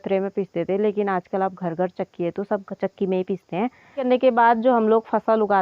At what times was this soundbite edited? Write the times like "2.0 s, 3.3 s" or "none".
4.1 s